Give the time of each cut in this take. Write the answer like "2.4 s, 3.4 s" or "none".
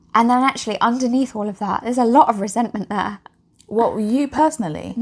none